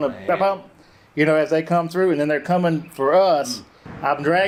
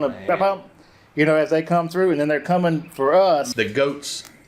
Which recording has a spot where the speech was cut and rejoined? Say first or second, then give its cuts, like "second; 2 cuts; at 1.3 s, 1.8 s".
second; 1 cut; at 3.5 s